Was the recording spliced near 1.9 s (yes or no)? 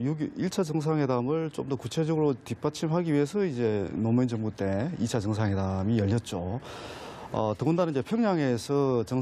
no